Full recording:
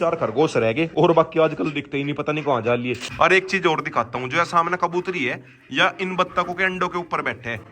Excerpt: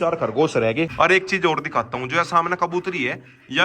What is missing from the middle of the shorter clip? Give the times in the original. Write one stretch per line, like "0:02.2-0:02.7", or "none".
0:00.9-0:03.1